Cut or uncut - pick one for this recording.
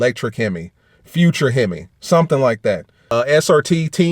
cut